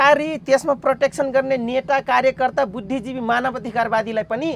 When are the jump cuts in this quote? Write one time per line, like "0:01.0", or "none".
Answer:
none